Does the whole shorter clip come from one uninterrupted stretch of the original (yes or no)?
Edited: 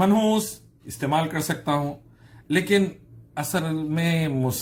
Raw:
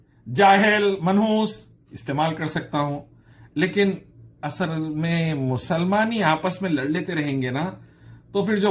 yes